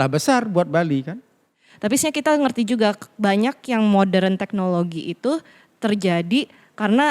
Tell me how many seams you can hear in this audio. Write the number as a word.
one